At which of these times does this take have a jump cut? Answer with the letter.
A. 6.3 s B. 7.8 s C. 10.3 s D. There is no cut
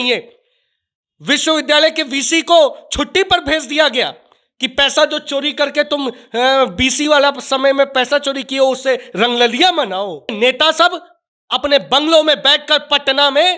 C